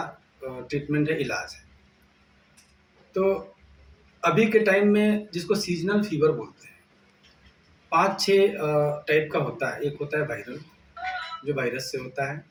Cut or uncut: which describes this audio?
uncut